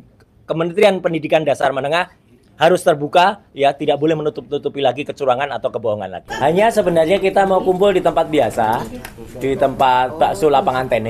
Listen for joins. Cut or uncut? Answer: cut